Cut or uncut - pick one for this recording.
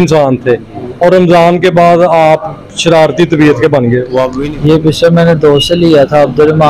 cut